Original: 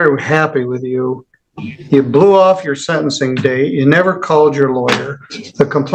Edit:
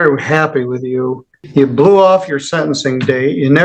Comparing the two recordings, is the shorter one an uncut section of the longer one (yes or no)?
no